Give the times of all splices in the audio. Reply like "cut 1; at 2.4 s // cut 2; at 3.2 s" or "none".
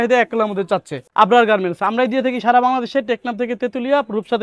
cut 1; at 1.0 s